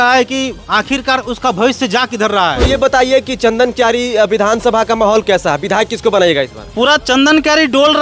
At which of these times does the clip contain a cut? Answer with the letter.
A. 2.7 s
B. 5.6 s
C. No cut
A